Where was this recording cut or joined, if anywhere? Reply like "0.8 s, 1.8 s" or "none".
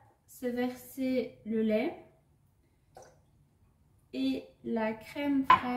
none